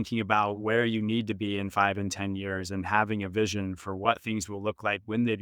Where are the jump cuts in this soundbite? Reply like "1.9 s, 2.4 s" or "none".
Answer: 4.0 s